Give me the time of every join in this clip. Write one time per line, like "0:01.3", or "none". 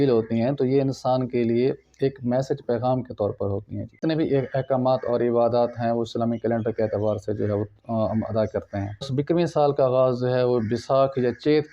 0:04.0
0:09.1